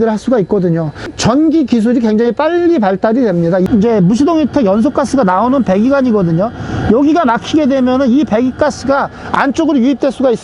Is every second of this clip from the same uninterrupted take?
no; 1 cut; at 3.6 s

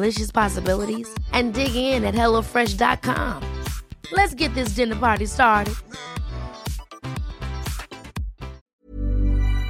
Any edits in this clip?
yes; 1 cut; at 8.6 s

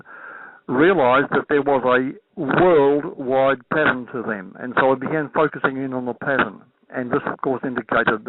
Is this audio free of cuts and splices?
no; 1 cut; at 1.3 s

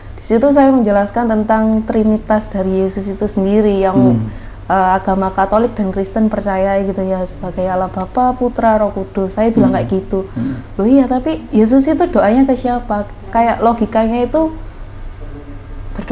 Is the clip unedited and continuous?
yes; 0 cuts

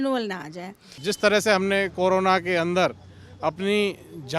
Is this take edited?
yes; 1 cut; at 0.9 s

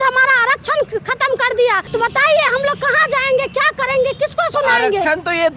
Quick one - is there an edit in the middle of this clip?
yes; 1 cut; at 1.8 s

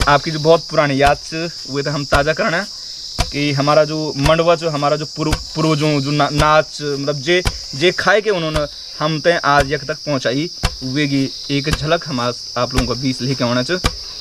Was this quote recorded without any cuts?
yes; 0 cuts

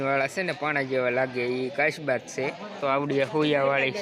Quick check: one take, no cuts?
no; 1 cut; at 2.8 s

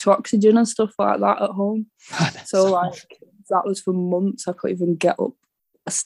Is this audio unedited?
yes; 0 cuts

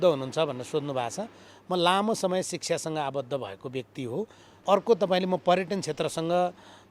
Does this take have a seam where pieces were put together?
yes; 1 cut; at 4.4 s

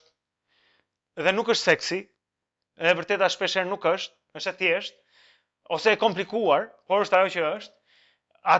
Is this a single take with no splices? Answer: yes; 0 cuts

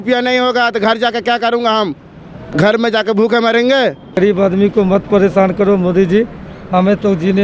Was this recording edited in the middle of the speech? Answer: yes; 1 cut; at 4.2 s

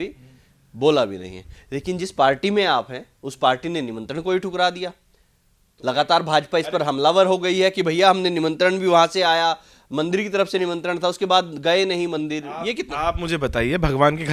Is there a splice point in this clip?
no; 0 cuts

